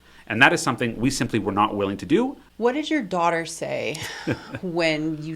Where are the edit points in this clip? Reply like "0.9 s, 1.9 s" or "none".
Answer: 2.4 s